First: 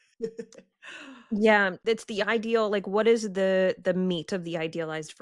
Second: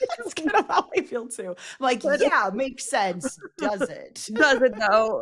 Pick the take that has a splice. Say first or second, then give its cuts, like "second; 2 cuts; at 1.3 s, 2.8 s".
first; 1 cut; at 1.8 s